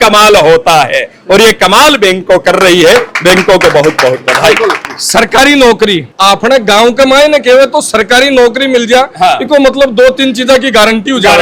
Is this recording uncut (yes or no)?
yes